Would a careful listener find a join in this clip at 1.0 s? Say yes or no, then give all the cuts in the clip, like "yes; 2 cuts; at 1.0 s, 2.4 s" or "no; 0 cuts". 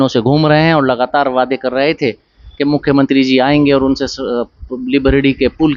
no; 0 cuts